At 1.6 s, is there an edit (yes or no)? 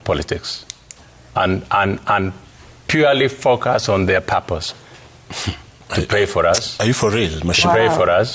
no